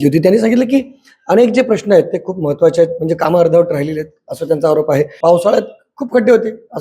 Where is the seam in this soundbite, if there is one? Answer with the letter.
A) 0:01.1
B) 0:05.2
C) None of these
B